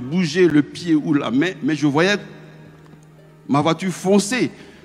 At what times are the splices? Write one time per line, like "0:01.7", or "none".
none